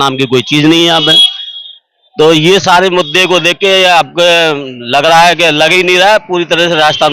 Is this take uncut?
yes; 0 cuts

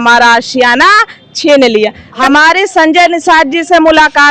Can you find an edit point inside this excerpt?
yes; 1 cut; at 2.1 s

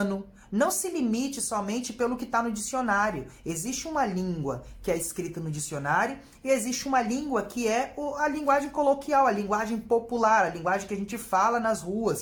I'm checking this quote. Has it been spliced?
no; 0 cuts

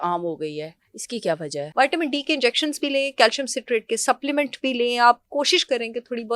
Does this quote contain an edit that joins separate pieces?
yes; 1 cut; at 1.6 s

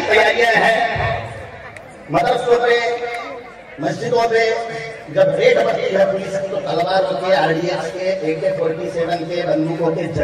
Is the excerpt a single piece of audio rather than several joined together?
yes; 0 cuts

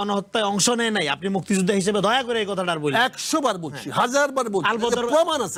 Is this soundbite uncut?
yes; 0 cuts

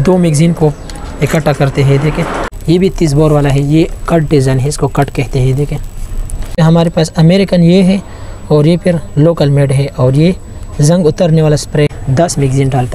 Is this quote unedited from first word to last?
no; 3 cuts; at 2.5 s, 6.6 s, 12.0 s

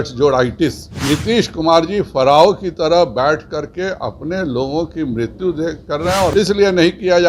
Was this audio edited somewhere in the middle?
yes; 2 cuts; at 0.9 s, 6.3 s

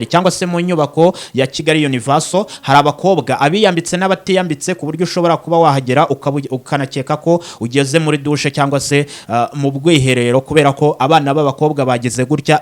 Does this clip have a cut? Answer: no; 0 cuts

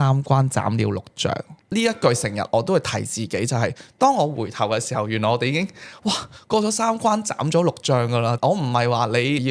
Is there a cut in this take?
no; 0 cuts

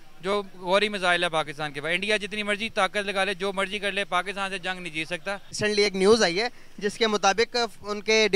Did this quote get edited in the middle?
yes; 1 cut; at 5.6 s

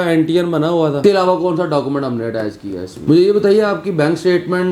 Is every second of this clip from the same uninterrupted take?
no; 2 cuts; at 1.0 s, 2.9 s

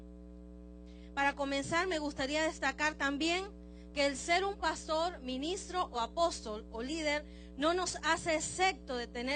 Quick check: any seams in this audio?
no; 0 cuts

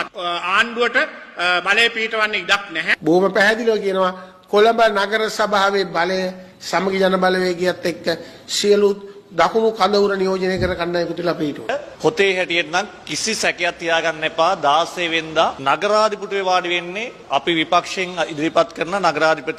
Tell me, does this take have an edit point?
no; 0 cuts

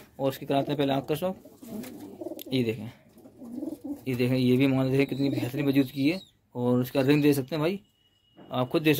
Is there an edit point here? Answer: no; 0 cuts

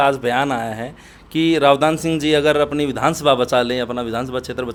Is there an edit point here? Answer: no; 0 cuts

